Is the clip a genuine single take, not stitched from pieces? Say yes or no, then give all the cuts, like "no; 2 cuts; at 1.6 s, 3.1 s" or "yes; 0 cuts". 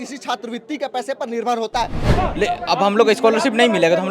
no; 1 cut; at 2.0 s